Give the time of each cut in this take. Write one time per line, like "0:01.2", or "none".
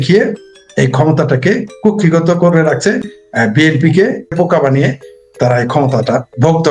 0:04.3